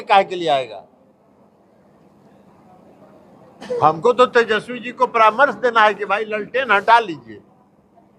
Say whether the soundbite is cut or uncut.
uncut